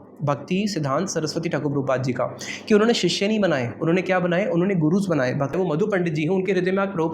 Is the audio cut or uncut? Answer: cut